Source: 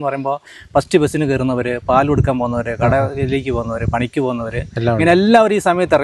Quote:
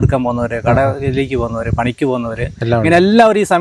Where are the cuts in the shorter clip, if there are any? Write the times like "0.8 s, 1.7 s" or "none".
none